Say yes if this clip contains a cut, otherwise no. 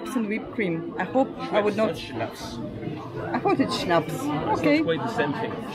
no